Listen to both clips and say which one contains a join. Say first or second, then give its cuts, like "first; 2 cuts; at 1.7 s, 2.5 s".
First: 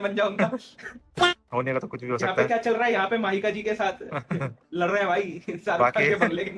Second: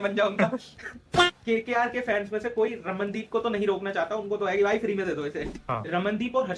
second; 2 cuts; at 1.2 s, 5.5 s